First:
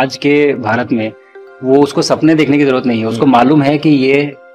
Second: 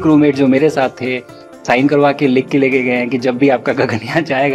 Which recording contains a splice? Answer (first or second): second